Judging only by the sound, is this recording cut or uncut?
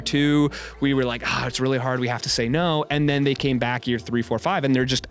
uncut